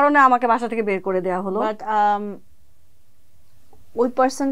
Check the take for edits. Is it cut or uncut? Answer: uncut